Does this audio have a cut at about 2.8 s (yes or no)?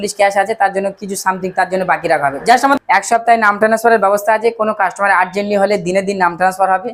yes